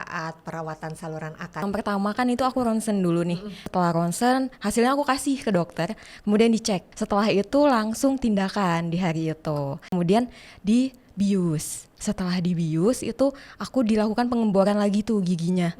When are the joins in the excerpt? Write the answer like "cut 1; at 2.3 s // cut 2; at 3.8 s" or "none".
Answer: cut 1; at 1.6 s // cut 2; at 3.5 s // cut 3; at 6.9 s // cut 4; at 9.9 s